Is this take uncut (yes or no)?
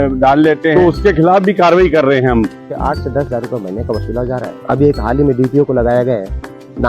no